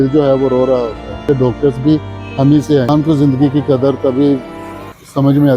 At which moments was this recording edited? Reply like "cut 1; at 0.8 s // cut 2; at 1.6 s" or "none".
cut 1; at 1.2 s // cut 2; at 2.9 s